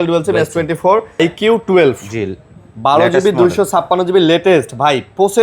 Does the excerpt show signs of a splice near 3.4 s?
no; 1 cut; at 1.2 s

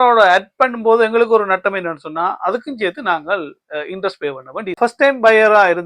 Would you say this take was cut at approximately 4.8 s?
yes; 1 cut; at 4.8 s

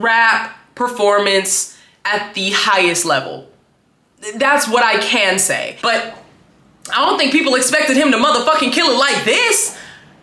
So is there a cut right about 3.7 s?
no; 1 cut; at 5.8 s

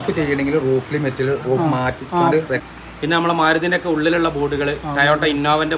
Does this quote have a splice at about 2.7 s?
yes; 1 cut; at 2.7 s

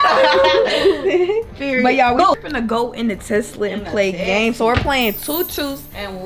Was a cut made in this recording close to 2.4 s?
yes; 1 cut; at 2.4 s

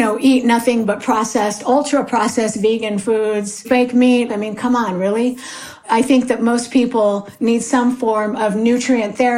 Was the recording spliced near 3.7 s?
yes; 1 cut; at 3.7 s

